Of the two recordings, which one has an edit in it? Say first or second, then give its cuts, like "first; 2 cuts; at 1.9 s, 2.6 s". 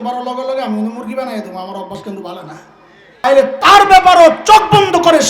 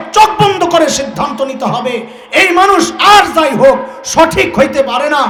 first; 1 cut; at 3.2 s